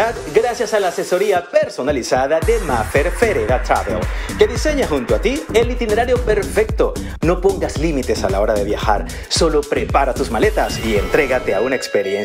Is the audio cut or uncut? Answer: uncut